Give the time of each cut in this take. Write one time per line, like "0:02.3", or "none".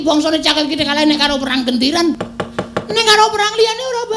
0:02.3